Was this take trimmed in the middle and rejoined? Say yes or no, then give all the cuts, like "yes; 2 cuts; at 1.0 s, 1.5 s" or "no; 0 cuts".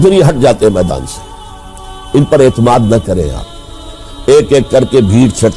yes; 1 cut; at 4.0 s